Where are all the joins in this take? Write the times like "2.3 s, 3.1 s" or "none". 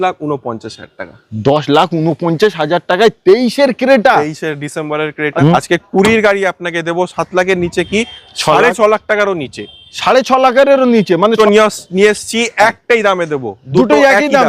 5.3 s, 11.3 s

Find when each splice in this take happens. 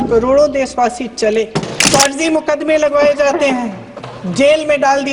1.7 s

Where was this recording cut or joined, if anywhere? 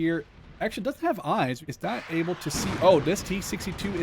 1.6 s

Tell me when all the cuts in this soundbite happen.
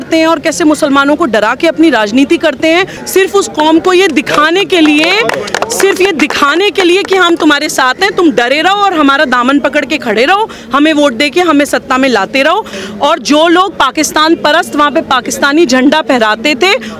3.0 s, 12.8 s

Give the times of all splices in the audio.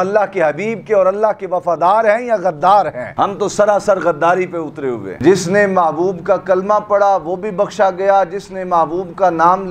5.2 s

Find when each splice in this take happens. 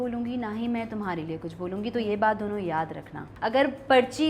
3.3 s

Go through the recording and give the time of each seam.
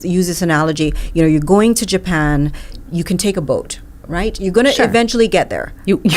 none

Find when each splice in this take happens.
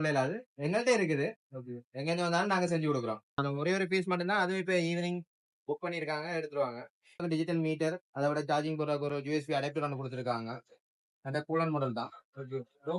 3.4 s, 7.2 s

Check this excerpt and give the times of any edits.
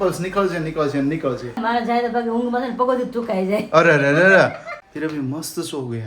1.6 s, 4.6 s

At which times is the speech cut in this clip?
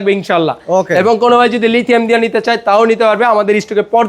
none

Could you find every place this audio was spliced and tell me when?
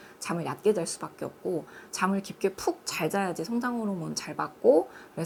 none

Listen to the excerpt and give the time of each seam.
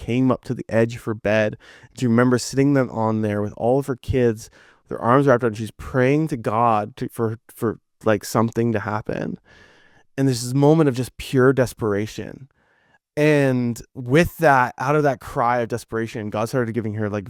none

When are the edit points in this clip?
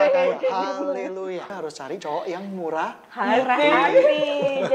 1.5 s

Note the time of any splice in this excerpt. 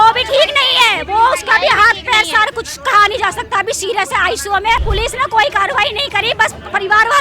4.8 s

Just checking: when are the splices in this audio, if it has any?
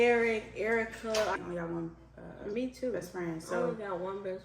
1.4 s

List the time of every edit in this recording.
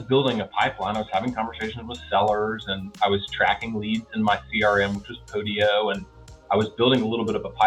none

